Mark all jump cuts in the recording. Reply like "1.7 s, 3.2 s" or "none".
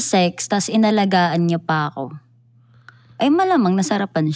none

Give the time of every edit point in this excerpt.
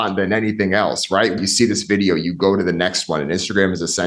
1.4 s

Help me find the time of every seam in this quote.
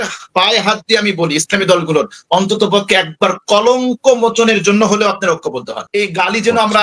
5.8 s

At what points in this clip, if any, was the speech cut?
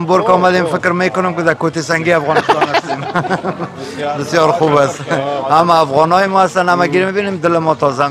none

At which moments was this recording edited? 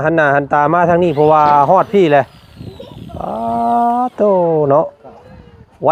none

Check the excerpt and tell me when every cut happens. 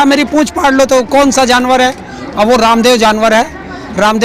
none

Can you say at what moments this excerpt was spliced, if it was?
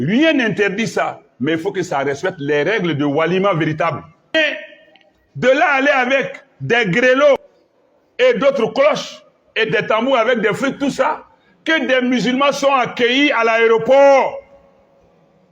4.3 s, 7.5 s

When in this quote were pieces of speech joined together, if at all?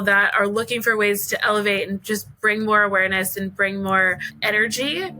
4.3 s

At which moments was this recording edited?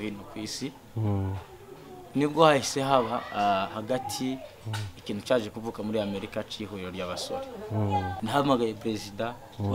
8.1 s

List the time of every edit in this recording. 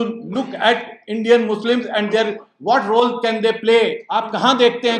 4.1 s

